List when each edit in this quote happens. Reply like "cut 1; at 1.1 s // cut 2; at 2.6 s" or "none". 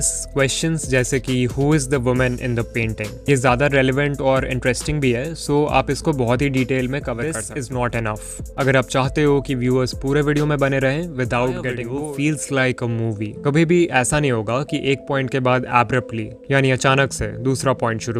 cut 1; at 7.5 s // cut 2; at 11.9 s